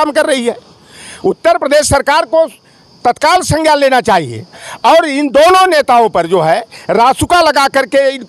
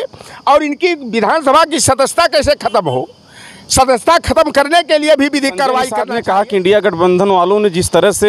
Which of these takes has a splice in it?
second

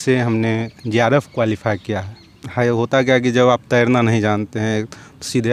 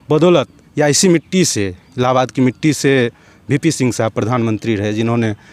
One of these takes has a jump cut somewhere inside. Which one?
first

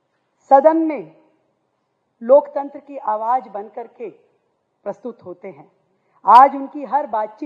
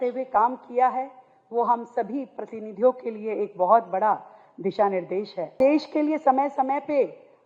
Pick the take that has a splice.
second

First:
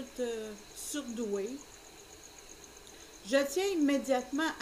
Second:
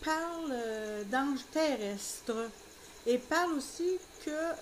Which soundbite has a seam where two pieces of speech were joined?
second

